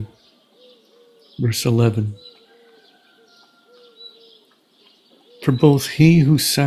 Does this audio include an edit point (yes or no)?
yes